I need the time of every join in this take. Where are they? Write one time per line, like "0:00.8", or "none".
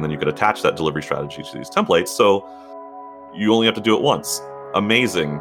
0:03.1

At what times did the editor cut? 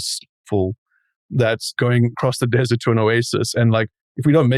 0:01.7

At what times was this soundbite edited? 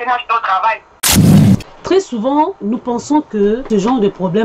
0:00.9
0:03.6

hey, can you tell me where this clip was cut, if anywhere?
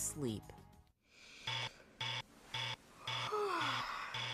0:02.8

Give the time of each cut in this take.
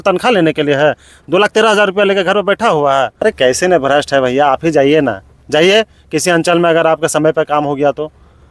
0:03.2

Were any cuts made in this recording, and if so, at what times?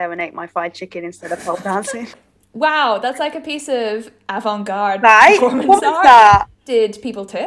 0:02.1
0:06.6

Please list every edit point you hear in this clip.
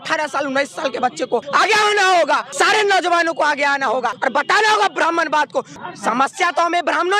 0:01.5
0:02.5
0:04.2
0:05.7

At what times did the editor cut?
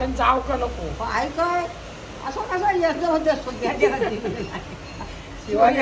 none

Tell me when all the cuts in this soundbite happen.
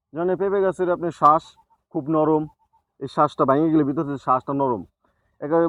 none

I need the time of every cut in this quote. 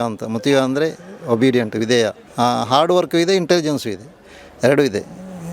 0:02.2

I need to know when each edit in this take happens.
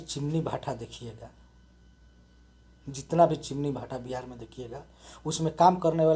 none

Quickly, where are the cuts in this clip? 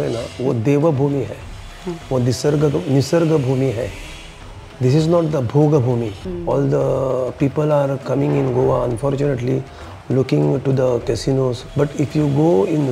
0:06.2
0:11.6

